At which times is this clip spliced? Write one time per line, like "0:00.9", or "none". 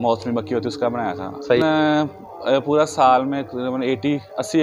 0:01.6